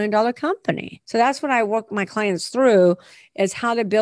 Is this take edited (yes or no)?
yes